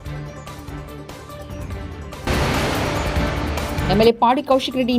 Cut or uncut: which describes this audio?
uncut